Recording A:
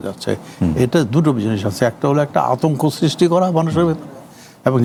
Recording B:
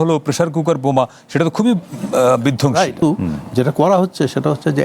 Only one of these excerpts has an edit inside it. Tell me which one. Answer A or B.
B